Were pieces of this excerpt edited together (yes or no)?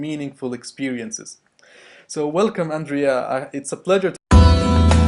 no